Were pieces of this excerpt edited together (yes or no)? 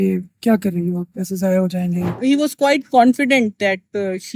yes